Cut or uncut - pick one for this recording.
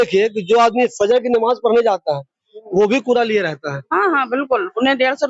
uncut